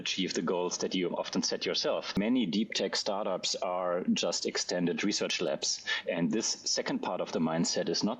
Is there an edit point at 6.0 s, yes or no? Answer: no